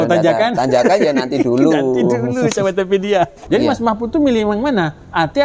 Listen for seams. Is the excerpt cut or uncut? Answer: cut